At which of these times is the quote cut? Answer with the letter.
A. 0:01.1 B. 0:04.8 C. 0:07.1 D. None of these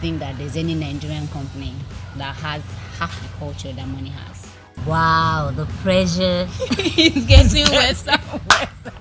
B